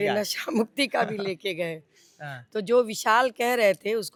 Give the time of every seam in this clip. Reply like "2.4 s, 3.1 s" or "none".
none

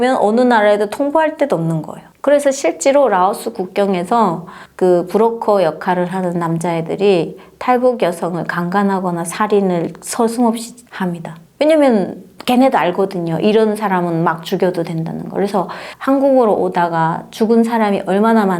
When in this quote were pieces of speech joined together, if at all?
none

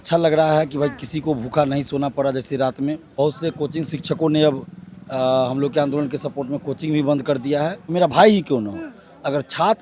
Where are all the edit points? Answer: 3.2 s, 7.9 s

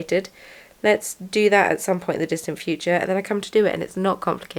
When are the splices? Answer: none

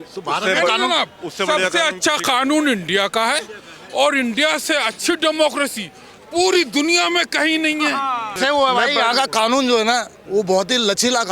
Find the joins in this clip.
8.4 s

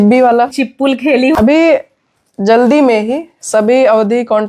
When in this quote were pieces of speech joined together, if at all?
1.1 s

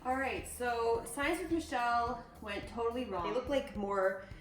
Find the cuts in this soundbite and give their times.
3.3 s

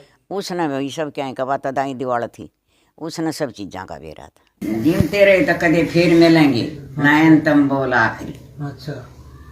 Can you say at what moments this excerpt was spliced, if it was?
4.6 s

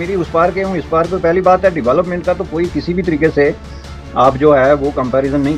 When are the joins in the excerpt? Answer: none

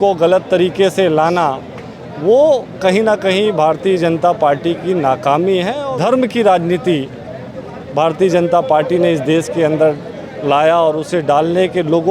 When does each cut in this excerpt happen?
5.8 s

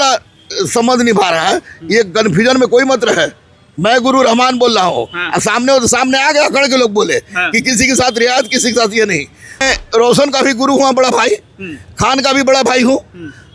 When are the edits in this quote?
9.6 s

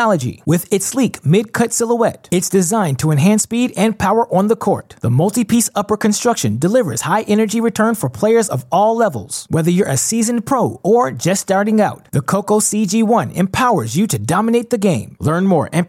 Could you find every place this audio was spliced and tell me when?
none

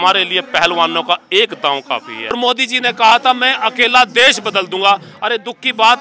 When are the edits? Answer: 2.3 s

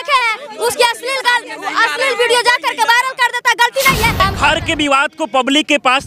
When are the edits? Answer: 4.2 s

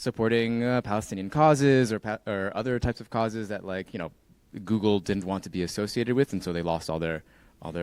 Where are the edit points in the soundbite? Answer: none

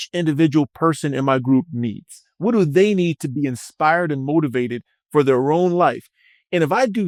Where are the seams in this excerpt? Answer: none

